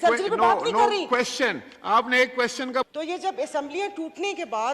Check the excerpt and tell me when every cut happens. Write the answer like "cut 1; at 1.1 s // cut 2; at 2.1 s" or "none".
cut 1; at 2.9 s